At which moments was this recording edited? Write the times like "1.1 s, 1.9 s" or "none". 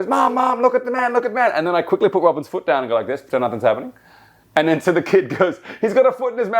none